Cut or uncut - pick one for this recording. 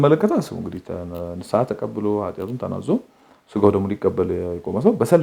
uncut